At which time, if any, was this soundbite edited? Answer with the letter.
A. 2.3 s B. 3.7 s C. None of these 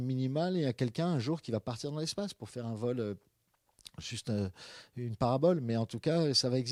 C